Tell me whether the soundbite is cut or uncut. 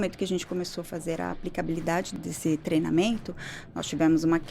cut